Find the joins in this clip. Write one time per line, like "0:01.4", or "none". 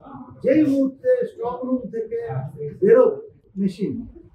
0:03.4